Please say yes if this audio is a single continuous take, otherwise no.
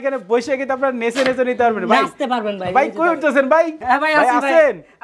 no